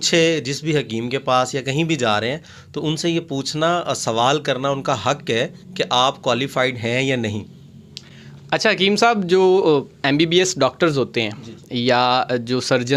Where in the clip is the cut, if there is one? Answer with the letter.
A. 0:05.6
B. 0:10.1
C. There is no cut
C